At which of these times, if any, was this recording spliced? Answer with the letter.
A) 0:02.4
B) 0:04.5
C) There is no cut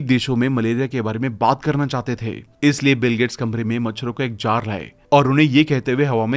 A